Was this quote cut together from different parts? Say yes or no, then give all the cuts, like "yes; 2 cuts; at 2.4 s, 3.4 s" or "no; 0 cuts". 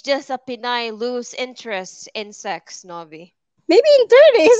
no; 0 cuts